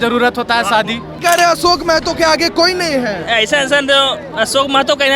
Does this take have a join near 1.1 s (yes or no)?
yes